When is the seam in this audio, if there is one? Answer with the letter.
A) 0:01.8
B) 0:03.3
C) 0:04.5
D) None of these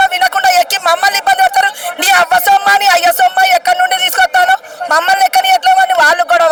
D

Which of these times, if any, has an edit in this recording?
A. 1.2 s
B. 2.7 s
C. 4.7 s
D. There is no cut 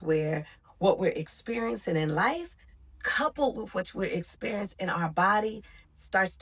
D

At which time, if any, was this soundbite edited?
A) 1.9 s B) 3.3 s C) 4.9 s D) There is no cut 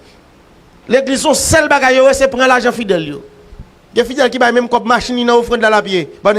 B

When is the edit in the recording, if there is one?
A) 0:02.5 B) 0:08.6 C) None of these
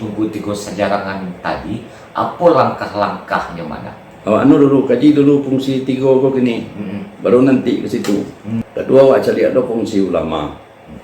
B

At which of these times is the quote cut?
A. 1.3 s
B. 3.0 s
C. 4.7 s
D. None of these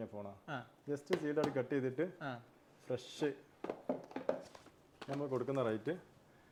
D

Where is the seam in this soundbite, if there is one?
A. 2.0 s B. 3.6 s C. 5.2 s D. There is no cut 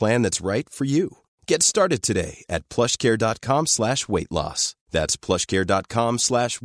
D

